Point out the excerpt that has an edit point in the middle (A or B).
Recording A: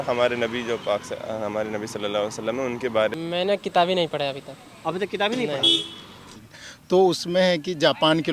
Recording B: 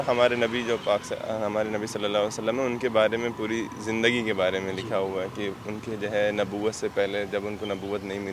A